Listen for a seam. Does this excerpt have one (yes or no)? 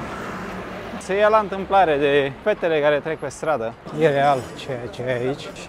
yes